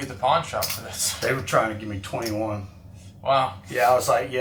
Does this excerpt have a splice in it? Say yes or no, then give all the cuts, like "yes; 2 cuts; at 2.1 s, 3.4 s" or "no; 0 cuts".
no; 0 cuts